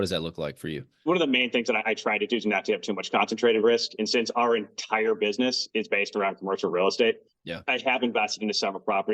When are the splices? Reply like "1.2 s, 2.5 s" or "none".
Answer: 0.9 s